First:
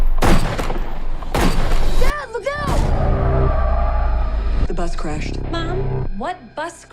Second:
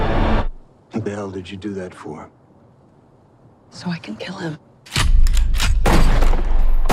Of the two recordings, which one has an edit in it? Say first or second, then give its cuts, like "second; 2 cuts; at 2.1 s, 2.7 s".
first; 2 cuts; at 1.9 s, 4.5 s